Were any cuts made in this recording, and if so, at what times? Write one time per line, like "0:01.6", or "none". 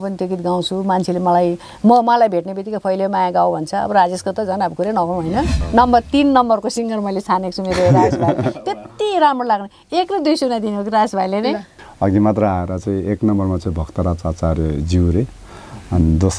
0:05.6
0:11.7

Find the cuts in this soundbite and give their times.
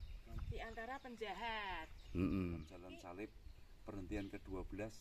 0:02.8

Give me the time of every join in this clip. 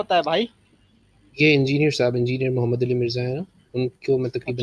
none

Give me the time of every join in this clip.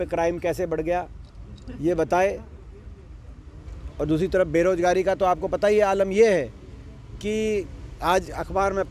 none

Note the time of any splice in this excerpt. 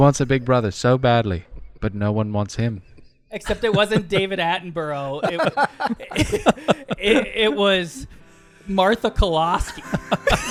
none

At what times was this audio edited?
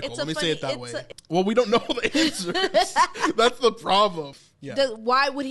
0:01.0
0:04.3

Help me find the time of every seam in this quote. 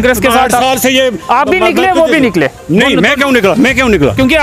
none

